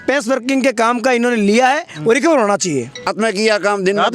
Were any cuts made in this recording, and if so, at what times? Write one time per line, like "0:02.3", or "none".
0:03.0